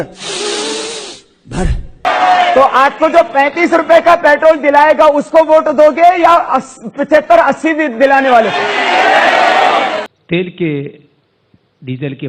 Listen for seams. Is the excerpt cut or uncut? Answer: cut